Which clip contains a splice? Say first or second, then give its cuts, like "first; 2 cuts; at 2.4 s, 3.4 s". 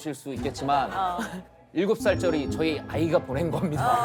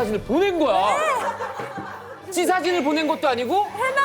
second; 1 cut; at 2.3 s